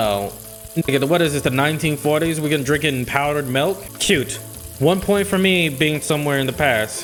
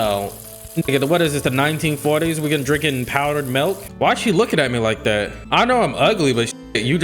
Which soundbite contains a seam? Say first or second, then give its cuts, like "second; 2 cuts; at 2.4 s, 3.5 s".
second; 1 cut; at 3.9 s